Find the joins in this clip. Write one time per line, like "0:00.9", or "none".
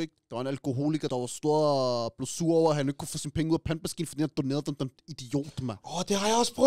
0:01.1